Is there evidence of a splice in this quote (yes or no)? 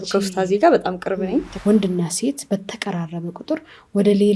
yes